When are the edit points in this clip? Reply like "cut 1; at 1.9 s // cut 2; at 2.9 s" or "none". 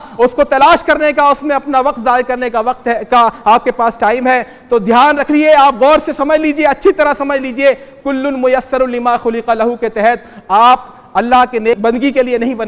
cut 1; at 11.8 s